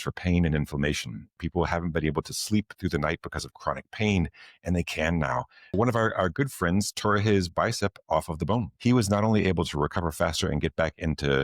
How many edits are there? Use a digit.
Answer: 3